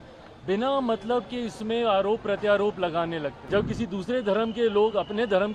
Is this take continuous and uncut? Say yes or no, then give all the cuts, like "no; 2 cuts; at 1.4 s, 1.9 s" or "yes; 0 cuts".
no; 1 cut; at 3.4 s